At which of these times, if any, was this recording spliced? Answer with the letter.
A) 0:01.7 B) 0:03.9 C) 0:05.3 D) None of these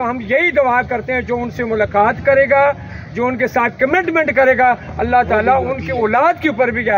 D